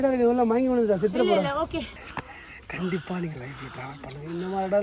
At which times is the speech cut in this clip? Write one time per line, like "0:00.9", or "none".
0:02.0